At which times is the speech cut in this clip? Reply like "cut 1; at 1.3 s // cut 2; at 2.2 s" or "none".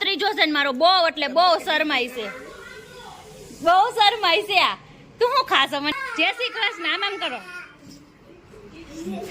cut 1; at 5.9 s